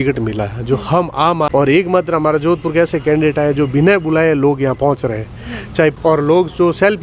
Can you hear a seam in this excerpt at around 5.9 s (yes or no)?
yes